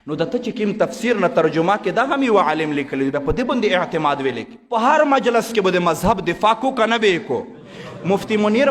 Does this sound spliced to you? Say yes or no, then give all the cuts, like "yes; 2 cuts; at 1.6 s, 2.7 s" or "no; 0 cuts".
yes; 1 cut; at 4.6 s